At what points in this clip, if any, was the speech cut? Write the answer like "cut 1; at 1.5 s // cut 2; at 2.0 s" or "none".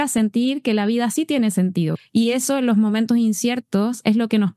cut 1; at 1.9 s